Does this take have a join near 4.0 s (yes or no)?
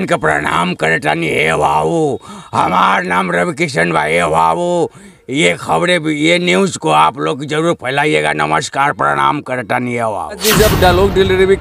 no